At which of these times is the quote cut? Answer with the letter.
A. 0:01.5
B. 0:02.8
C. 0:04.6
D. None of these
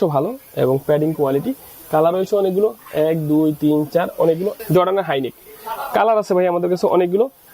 C